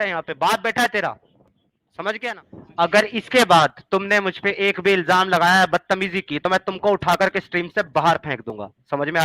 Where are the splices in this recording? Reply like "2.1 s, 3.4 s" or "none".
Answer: 2.4 s